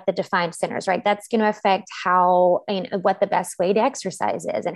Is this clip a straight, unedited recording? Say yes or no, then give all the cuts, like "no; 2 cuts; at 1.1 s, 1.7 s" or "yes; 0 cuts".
yes; 0 cuts